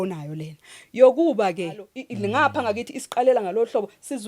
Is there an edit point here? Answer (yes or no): yes